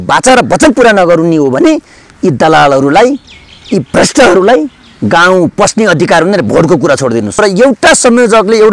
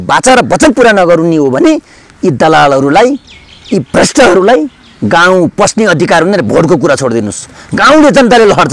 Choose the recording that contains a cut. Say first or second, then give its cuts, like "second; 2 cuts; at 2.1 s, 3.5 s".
first; 1 cut; at 7.3 s